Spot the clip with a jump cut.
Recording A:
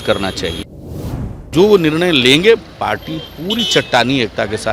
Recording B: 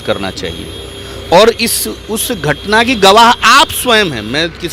A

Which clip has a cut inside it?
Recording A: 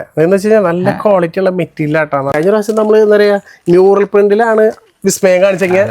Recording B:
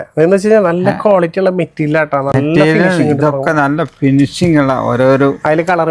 A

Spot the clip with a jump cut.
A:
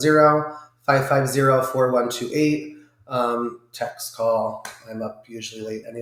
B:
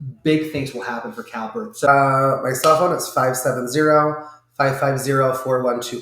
B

